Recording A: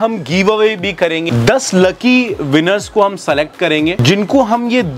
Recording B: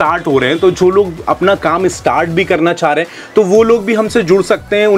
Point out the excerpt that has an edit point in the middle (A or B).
A